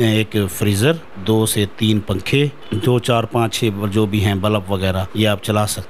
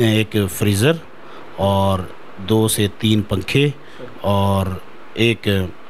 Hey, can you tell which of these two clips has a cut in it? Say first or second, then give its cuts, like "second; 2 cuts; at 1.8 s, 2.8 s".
first; 3 cuts; at 1.1 s, 2.6 s, 5.1 s